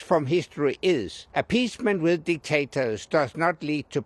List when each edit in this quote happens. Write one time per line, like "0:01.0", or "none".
0:01.2

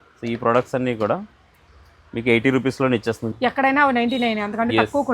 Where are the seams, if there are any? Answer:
0:03.3

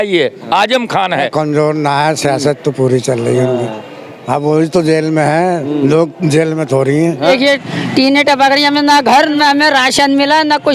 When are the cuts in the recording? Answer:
0:01.3
0:07.2
0:09.4

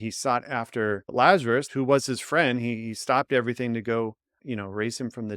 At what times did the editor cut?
0:01.0
0:01.7

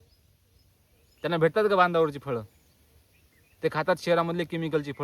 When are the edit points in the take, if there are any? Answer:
none

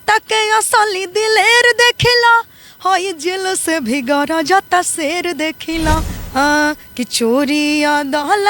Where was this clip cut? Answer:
0:06.2

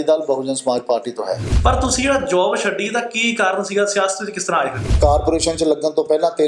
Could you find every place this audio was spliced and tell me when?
0:01.5
0:04.8

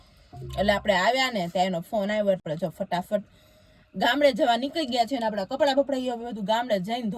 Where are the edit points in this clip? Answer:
0:02.4

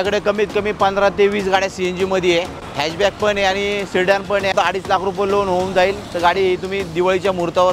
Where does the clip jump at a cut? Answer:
0:02.6
0:04.5

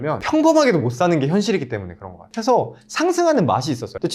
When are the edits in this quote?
0:02.2

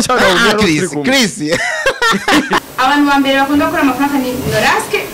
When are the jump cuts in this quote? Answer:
0:02.6

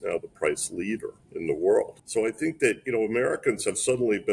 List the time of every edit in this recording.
0:01.2
0:02.0

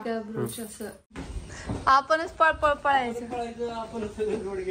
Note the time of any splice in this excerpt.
0:01.2

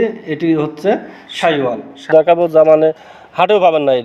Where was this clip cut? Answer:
0:02.1

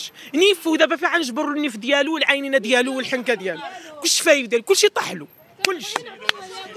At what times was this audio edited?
none

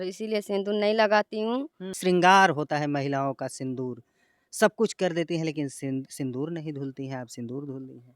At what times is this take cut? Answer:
0:01.9

